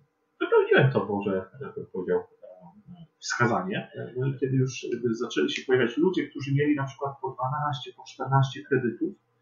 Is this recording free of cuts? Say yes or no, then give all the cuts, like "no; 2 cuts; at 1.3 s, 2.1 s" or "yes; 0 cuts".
no; 1 cut; at 4.0 s